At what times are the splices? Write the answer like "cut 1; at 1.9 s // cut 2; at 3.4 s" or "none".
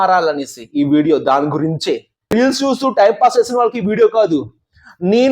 cut 1; at 2.3 s

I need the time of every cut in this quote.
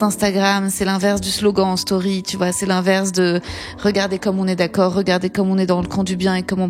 none

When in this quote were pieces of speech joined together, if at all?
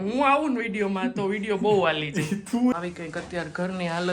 cut 1; at 2.7 s

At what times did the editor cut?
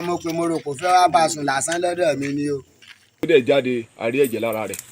cut 1; at 3.2 s

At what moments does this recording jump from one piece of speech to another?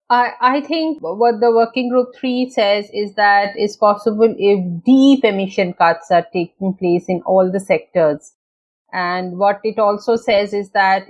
cut 1; at 1.0 s

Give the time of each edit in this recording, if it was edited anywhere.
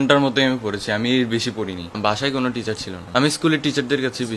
cut 1; at 2.0 s // cut 2; at 2.9 s

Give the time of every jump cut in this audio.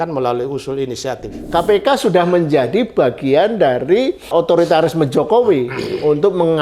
cut 1; at 1.4 s // cut 2; at 4.3 s

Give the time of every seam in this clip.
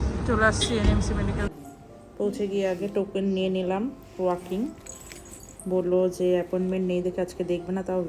none

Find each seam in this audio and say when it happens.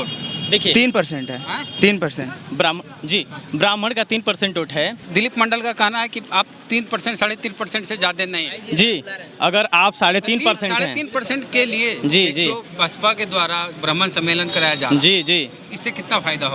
none

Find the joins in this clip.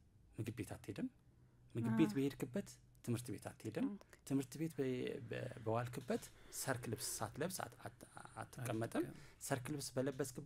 none

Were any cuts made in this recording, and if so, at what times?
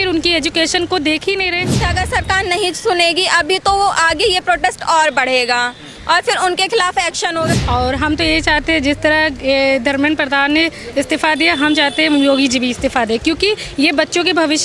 cut 1; at 1.8 s // cut 2; at 7.5 s

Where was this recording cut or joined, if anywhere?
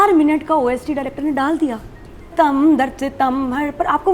cut 1; at 2.3 s

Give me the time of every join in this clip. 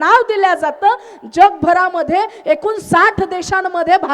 none

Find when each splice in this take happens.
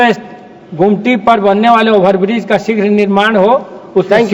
none

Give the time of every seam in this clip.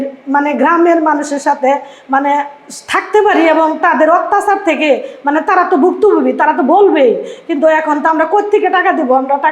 none

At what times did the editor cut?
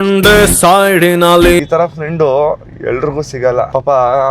cut 1; at 1.6 s

